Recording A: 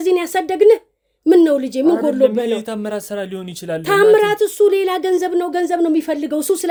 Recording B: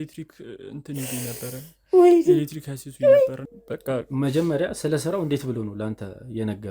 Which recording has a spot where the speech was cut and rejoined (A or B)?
B